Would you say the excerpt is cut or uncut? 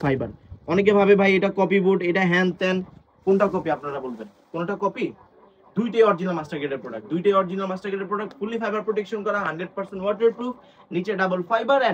uncut